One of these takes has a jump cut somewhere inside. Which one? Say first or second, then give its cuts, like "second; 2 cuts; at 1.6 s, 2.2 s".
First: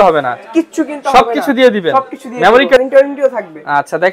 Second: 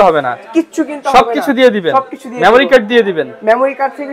first; 1 cut; at 2.8 s